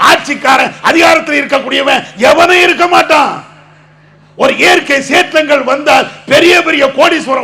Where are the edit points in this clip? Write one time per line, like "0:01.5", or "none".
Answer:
none